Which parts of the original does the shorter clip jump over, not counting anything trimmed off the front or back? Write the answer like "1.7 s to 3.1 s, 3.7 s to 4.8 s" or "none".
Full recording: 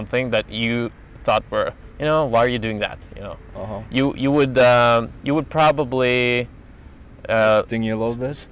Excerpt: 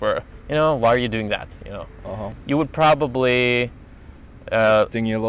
3.9 s to 5.1 s